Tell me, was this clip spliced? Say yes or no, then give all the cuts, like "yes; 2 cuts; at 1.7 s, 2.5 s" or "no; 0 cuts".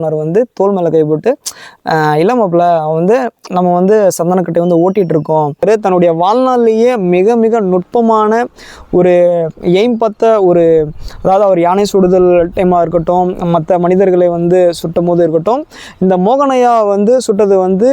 yes; 1 cut; at 5.6 s